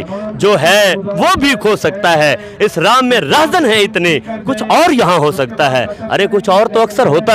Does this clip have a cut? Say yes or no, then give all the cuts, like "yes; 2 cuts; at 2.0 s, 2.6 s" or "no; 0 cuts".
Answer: no; 0 cuts